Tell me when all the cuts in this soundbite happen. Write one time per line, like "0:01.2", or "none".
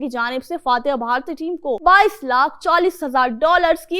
0:01.8